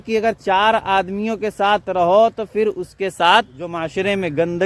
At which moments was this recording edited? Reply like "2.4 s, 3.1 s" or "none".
3.7 s